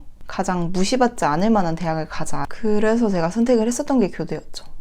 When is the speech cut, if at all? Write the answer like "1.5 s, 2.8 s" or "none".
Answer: 2.4 s